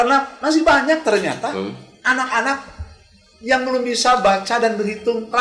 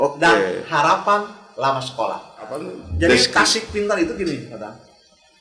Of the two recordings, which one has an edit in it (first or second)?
second